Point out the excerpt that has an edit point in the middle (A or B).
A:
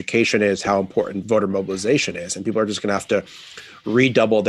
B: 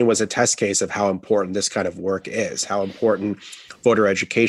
A